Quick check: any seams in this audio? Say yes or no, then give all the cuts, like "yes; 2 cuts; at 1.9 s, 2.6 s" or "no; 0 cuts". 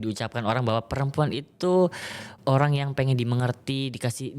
yes; 1 cut; at 2.3 s